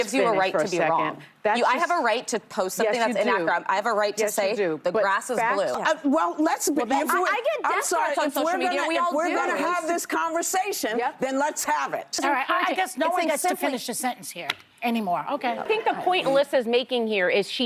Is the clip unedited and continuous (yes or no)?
no